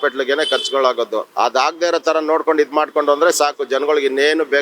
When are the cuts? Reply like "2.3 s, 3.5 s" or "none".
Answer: 1.3 s